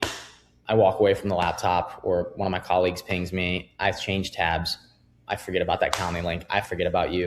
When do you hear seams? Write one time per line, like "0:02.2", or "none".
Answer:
none